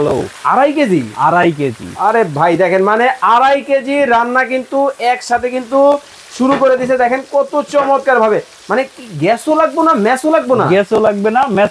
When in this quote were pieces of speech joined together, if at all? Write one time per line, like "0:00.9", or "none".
none